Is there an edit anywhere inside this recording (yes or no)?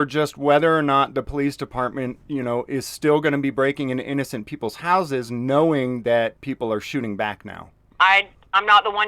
yes